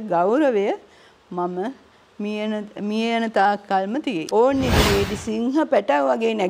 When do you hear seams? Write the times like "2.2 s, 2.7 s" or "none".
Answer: 4.2 s